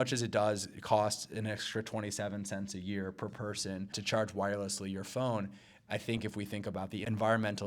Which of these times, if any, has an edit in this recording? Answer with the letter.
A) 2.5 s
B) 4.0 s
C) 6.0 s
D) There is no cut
B